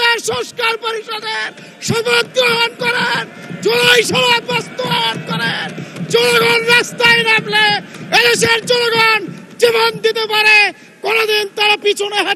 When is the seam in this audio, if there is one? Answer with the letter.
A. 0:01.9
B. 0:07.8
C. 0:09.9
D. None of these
D